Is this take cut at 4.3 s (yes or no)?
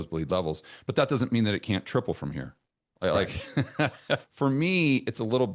yes